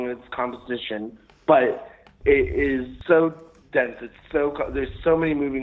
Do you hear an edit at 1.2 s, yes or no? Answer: no